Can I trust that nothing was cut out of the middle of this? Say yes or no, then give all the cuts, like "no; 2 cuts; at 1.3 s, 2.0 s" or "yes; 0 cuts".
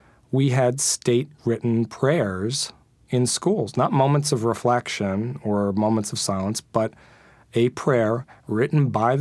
yes; 0 cuts